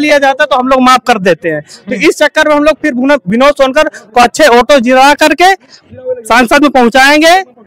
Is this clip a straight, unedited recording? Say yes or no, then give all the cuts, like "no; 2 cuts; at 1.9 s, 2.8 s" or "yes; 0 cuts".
yes; 0 cuts